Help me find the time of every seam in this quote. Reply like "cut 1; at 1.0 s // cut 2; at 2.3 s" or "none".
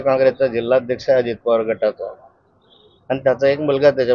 none